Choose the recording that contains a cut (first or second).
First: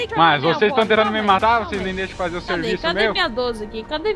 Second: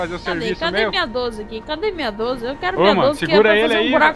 first